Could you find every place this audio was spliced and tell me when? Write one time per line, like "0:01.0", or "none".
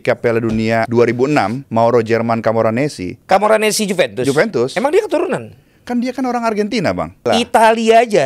0:00.9
0:01.6
0:03.1
0:07.3